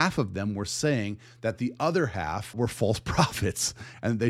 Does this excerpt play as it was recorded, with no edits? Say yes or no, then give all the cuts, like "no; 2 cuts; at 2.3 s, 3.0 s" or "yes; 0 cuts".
no; 1 cut; at 2.5 s